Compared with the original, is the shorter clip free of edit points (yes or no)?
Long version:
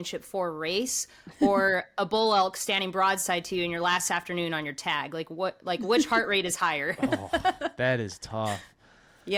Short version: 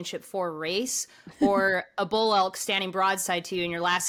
yes